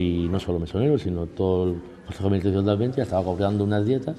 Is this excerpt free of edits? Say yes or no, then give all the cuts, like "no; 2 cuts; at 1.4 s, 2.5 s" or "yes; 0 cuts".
yes; 0 cuts